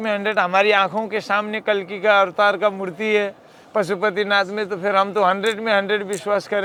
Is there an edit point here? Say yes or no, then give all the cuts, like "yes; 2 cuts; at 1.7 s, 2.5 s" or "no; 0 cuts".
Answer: no; 0 cuts